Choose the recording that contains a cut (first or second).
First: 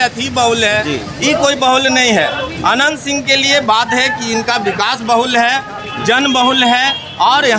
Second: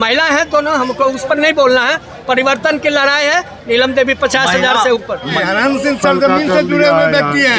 second